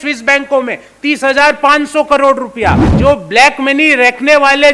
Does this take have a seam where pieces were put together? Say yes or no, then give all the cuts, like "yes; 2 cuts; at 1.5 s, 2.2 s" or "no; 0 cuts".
yes; 1 cut; at 2.9 s